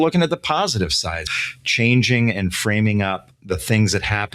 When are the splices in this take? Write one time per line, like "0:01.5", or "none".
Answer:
0:01.3
0:03.3